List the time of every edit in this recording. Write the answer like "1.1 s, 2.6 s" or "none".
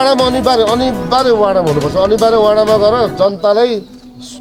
none